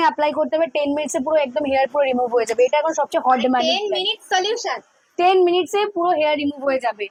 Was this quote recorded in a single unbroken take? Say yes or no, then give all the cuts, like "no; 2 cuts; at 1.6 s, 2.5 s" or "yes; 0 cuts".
yes; 0 cuts